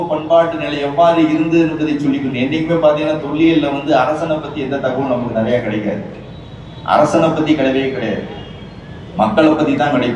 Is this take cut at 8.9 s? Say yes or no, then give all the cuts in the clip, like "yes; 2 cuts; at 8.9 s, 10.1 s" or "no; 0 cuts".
no; 0 cuts